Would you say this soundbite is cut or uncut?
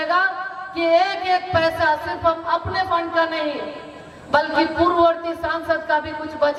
uncut